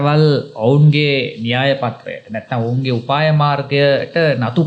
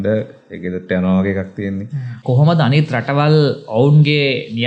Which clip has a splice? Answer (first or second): second